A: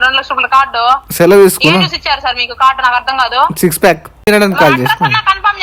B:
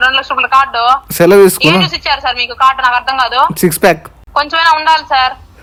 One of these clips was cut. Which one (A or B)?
A